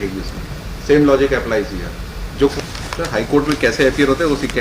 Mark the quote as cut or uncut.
cut